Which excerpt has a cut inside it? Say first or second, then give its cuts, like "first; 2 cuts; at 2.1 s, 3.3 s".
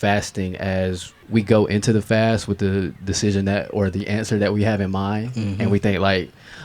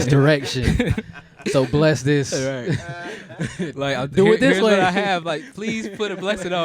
first; 1 cut; at 1.1 s